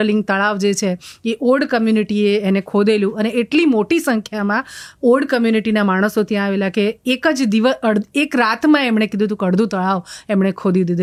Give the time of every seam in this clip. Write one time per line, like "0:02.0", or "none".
none

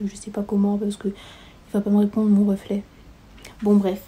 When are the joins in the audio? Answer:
none

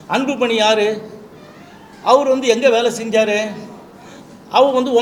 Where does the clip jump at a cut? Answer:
none

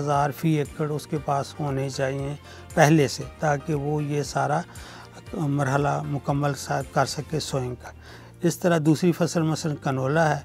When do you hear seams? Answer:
none

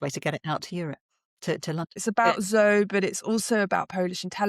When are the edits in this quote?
0:02.0

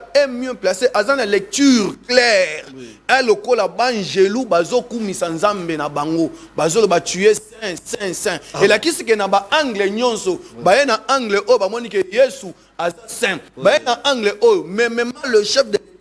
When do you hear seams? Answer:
none

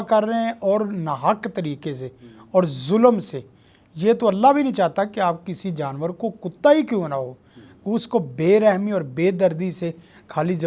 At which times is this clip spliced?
none

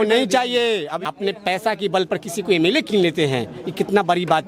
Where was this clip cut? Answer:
0:00.9

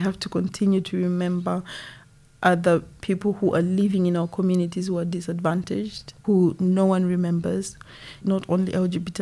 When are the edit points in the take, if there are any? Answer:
0:02.9
0:06.1
0:08.2

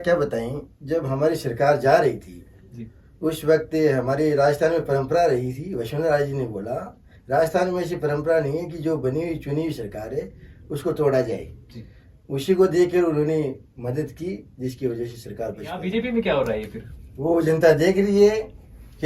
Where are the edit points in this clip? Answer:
0:15.8

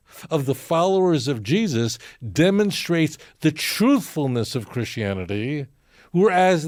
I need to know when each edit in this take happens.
none

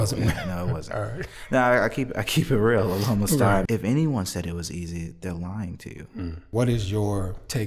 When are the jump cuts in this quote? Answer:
0:03.7
0:06.4

